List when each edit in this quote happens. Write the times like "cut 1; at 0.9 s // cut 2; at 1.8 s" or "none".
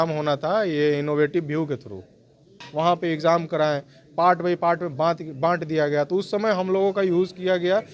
cut 1; at 2.6 s

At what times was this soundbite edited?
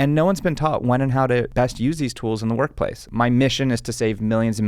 cut 1; at 1.5 s // cut 2; at 3.1 s

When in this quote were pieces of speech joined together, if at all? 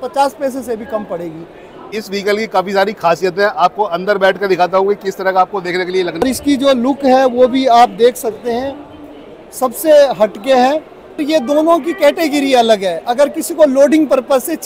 cut 1; at 1.9 s // cut 2; at 6.2 s // cut 3; at 11.2 s

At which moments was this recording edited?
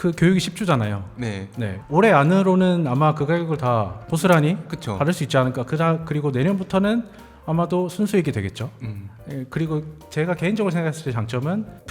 cut 1; at 1.7 s

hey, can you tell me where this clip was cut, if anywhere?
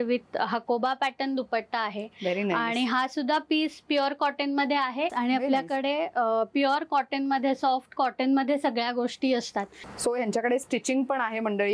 cut 1; at 5.1 s // cut 2; at 9.8 s

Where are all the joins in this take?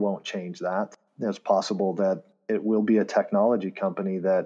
cut 1; at 1.0 s

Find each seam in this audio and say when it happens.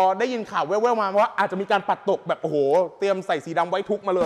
none

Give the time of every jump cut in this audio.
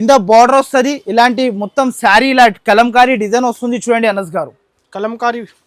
none

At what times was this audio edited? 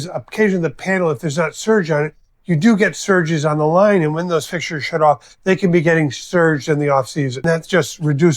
cut 1; at 7.4 s

